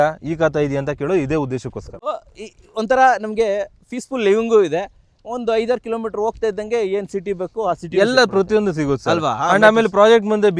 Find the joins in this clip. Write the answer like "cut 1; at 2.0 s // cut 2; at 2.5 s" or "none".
cut 1; at 2.1 s